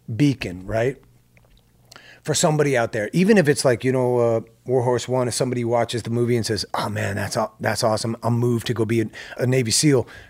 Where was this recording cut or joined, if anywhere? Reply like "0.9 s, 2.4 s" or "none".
9.3 s